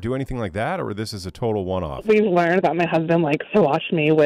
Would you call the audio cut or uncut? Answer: cut